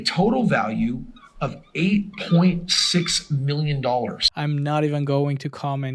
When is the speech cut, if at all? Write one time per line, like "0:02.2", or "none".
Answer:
none